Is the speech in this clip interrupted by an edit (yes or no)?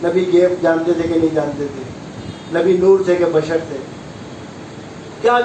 no